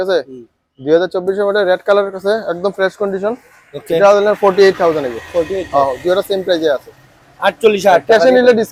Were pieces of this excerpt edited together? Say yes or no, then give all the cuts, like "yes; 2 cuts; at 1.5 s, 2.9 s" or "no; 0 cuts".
no; 0 cuts